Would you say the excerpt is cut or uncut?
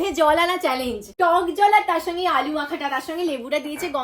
cut